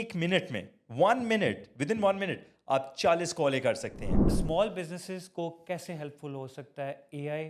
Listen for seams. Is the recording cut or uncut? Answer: cut